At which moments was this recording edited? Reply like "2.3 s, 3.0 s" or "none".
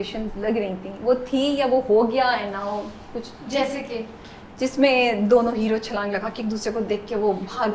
none